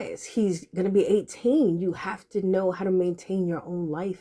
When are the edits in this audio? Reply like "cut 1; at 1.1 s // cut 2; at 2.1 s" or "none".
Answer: none